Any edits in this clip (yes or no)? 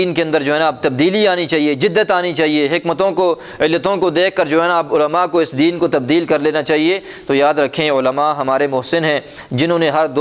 no